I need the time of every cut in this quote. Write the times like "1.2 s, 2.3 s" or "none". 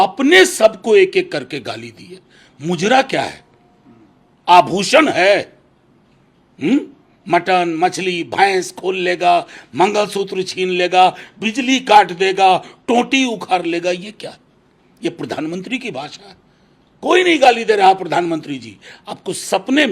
none